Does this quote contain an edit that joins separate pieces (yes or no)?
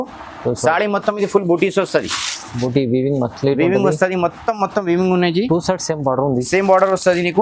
no